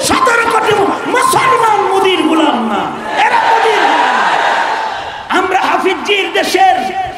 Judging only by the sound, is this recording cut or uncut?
cut